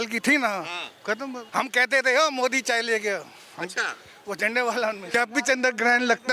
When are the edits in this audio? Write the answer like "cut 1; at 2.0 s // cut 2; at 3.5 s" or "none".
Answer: cut 1; at 1.4 s // cut 2; at 5.0 s